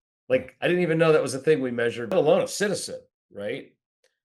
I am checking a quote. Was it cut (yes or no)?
yes